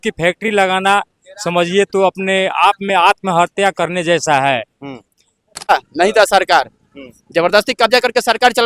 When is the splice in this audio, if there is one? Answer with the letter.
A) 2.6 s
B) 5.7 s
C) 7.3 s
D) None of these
B